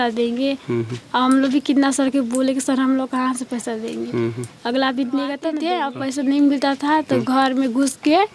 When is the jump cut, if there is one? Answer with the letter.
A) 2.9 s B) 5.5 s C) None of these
B